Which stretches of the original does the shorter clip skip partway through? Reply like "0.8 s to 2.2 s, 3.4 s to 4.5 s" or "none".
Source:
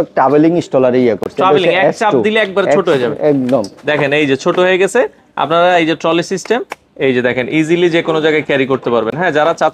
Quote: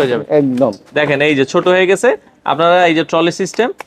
none